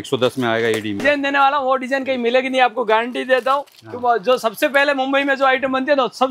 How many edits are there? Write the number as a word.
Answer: one